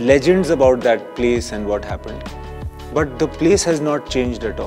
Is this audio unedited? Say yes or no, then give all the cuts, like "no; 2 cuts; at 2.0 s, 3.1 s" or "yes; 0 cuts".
yes; 0 cuts